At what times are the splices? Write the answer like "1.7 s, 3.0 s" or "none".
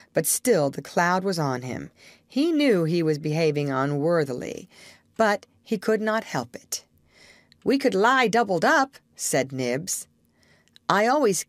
1.1 s